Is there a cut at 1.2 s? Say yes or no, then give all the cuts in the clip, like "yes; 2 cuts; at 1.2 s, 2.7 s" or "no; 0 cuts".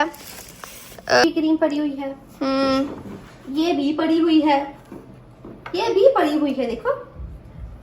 yes; 1 cut; at 1.2 s